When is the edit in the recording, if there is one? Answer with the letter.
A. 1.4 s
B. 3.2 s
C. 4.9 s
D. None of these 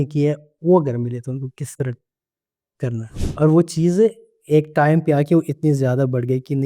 B